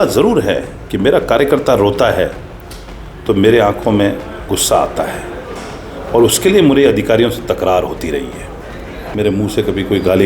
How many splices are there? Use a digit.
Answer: 1